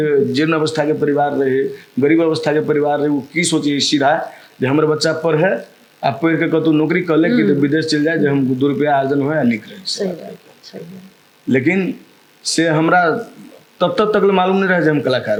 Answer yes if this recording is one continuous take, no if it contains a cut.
yes